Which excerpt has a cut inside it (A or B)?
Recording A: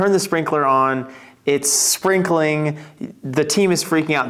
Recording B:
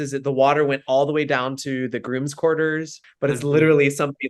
B